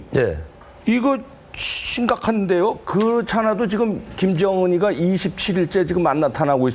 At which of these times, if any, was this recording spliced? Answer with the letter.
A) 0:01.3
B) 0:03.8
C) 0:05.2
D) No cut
D